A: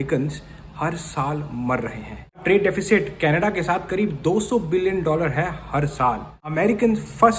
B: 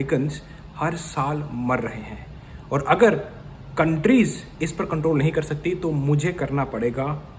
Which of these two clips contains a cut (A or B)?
A